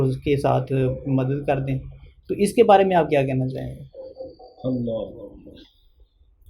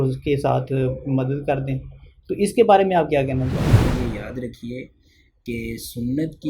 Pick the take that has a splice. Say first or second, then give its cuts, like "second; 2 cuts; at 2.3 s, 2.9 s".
second; 1 cut; at 3.9 s